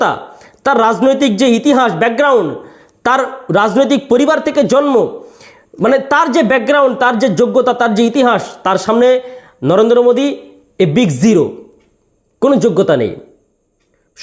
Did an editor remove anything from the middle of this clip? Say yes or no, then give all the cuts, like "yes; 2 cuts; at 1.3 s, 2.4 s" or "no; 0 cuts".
no; 0 cuts